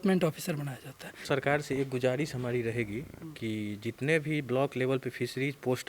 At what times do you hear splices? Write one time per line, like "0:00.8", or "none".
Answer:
0:01.3